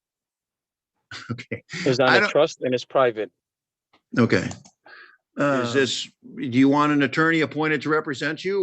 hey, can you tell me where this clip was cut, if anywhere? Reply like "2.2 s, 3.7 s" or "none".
5.7 s